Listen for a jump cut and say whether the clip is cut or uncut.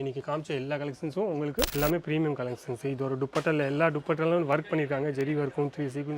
cut